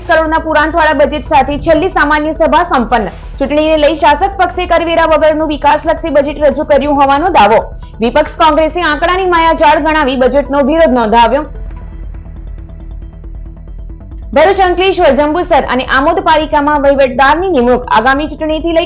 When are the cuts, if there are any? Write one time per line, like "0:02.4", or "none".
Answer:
none